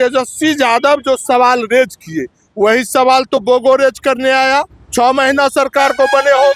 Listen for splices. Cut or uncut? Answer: cut